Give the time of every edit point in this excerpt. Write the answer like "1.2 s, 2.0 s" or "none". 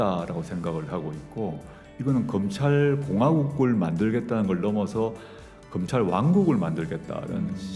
none